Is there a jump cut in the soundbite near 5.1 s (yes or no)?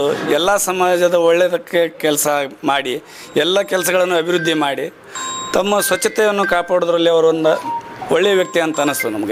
no